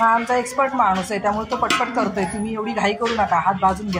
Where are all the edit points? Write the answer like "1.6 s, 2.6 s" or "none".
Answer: none